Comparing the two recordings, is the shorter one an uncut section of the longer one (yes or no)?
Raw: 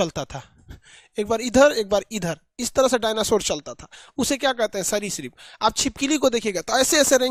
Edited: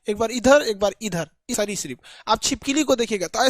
no